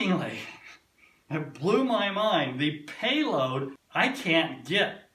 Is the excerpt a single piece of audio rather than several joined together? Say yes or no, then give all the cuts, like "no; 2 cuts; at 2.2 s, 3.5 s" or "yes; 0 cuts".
no; 1 cut; at 3.7 s